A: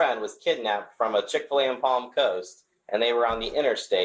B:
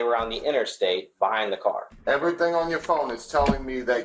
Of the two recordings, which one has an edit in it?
B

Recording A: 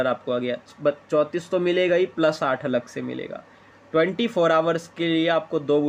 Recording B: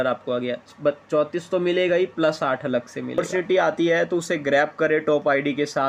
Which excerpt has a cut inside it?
B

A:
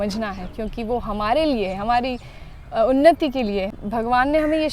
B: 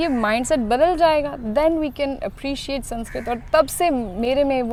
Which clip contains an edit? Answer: A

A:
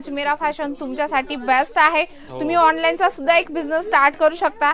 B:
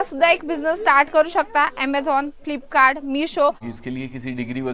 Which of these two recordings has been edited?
B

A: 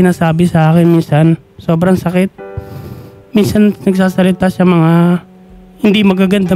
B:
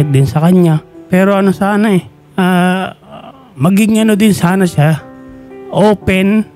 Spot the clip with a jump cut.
B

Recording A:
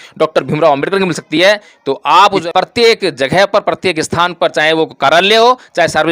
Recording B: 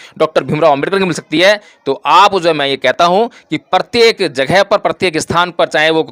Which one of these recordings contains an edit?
A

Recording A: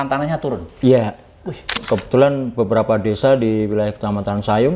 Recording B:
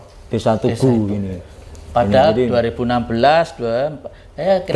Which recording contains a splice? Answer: A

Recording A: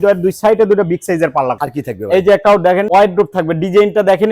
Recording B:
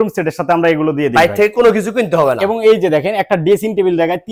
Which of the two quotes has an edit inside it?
A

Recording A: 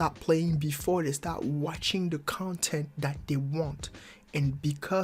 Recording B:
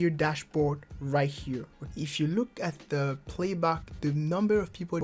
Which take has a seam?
B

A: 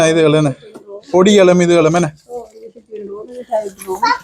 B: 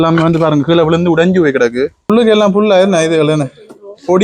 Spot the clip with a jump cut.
B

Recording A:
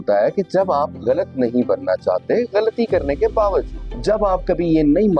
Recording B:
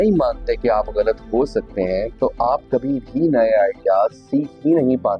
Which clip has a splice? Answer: A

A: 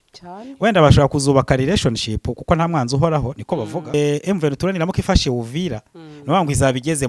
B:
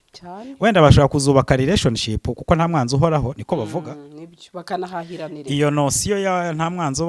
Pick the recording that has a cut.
A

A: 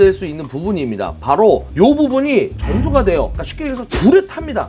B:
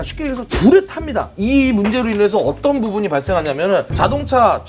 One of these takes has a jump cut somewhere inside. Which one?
A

